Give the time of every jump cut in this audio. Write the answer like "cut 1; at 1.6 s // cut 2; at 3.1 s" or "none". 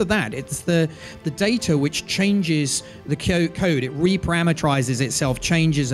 none

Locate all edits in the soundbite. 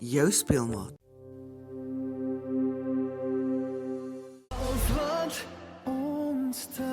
cut 1; at 4.2 s

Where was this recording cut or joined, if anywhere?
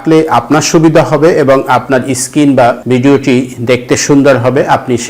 cut 1; at 2.8 s

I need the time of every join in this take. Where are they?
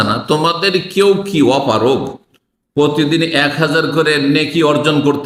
none

